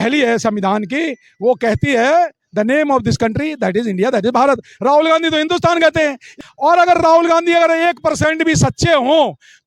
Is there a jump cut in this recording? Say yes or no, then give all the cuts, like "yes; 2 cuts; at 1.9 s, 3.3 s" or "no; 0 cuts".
yes; 1 cut; at 6.3 s